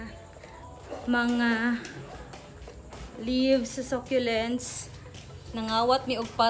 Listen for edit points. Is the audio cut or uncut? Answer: uncut